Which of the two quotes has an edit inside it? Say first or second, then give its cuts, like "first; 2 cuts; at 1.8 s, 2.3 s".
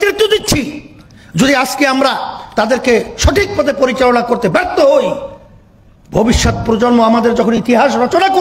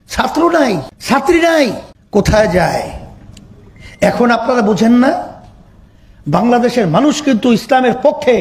second; 2 cuts; at 0.9 s, 1.9 s